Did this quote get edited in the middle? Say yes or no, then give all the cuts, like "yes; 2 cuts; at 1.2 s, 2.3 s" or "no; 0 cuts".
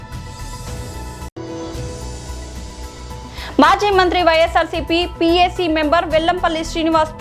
no; 0 cuts